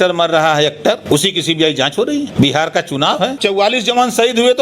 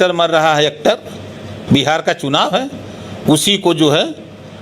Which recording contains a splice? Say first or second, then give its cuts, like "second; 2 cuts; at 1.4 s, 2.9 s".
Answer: first; 3 cuts; at 1.0 s, 2.3 s, 3.4 s